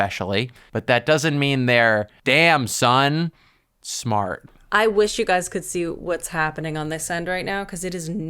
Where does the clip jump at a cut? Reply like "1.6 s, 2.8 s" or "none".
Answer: none